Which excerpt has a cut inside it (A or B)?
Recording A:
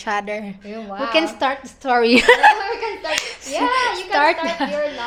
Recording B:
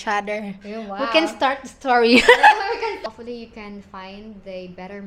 B